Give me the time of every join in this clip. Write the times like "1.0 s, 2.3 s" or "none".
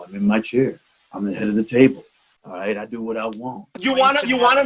3.7 s